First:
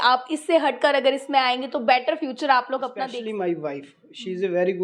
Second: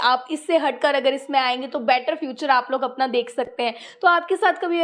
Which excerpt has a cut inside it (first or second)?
first